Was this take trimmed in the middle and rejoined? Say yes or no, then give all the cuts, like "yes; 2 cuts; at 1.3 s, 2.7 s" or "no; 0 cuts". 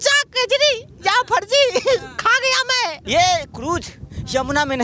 yes; 1 cut; at 3.0 s